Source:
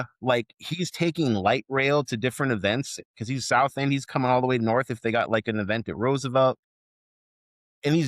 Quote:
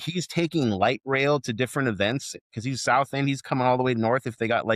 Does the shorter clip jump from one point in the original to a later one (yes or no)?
no